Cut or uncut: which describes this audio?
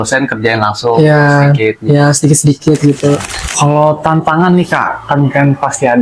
cut